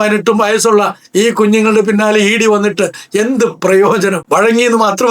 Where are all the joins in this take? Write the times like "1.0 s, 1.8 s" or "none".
4.2 s